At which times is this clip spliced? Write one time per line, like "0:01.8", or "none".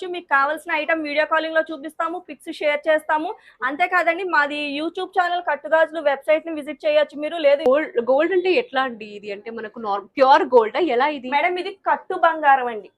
0:07.7